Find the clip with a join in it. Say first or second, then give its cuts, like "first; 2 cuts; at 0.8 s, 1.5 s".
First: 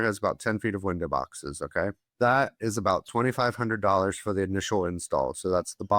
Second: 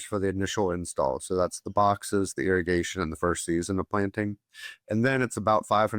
first; 1 cut; at 2.0 s